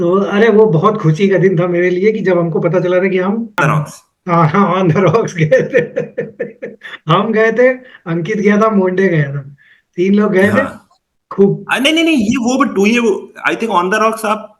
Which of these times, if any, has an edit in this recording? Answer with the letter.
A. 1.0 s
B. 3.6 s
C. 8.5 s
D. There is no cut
B